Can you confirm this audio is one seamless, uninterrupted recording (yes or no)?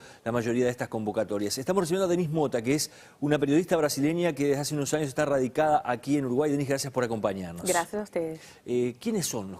no